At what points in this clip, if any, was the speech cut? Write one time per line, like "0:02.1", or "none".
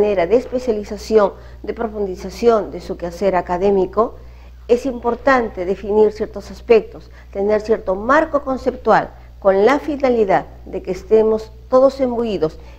0:11.5